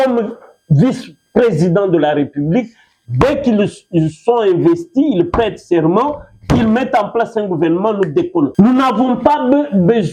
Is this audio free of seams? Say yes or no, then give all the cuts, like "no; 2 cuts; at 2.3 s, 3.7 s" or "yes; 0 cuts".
yes; 0 cuts